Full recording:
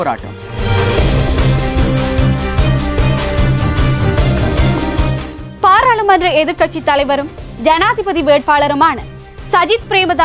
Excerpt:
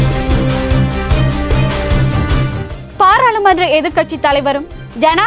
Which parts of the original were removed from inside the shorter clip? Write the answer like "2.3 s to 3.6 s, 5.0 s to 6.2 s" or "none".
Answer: 4.1 s to 5.3 s